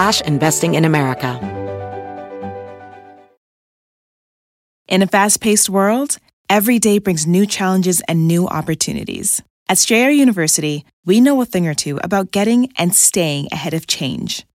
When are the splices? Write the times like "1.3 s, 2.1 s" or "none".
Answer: 1.4 s